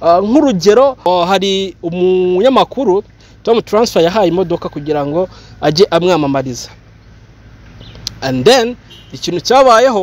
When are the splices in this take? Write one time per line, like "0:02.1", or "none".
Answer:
0:01.0

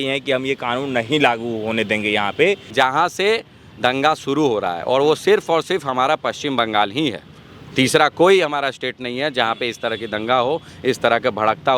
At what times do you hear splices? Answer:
0:02.6

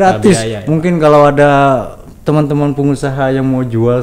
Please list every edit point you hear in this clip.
none

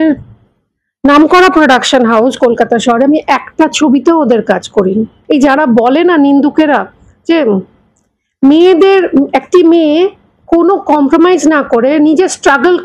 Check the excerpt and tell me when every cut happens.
0:05.1

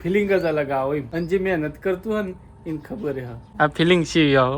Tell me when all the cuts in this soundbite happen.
0:01.1
0:03.4

